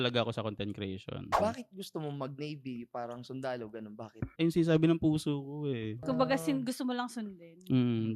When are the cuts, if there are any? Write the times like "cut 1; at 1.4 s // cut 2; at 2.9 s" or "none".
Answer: cut 1; at 1.4 s // cut 2; at 4.3 s